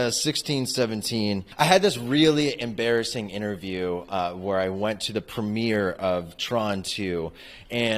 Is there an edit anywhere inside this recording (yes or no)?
yes